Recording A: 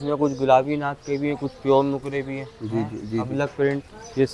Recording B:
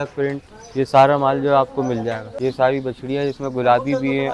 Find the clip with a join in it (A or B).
B